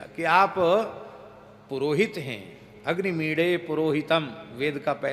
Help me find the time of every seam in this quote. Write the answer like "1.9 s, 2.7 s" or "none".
none